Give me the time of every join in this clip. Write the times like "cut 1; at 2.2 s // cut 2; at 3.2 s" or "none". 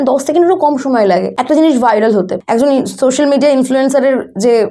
cut 1; at 1.3 s // cut 2; at 2.4 s